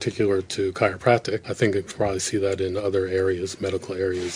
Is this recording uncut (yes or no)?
no